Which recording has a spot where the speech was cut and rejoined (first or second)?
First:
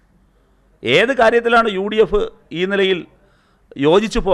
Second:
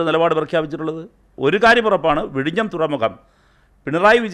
second